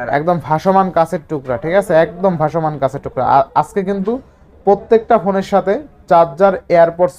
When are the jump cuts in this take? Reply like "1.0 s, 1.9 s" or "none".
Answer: none